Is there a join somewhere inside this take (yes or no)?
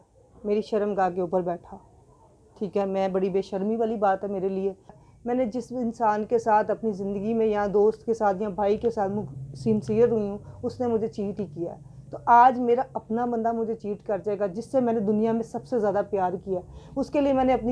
yes